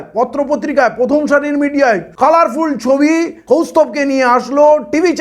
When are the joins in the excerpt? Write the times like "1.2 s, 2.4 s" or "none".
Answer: 2.1 s, 3.3 s